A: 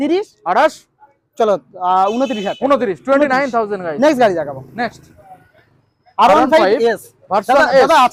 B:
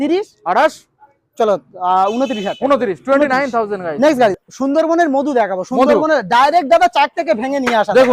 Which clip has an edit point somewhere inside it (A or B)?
B